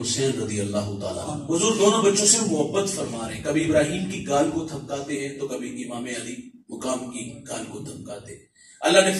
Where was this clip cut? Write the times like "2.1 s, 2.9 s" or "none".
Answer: 1.3 s